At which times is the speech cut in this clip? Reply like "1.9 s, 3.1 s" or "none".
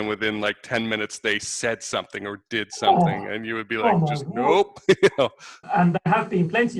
5.6 s